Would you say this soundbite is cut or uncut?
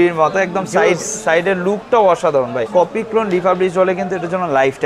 cut